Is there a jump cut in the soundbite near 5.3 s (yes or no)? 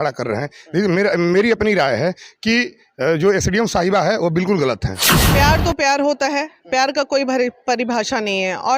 yes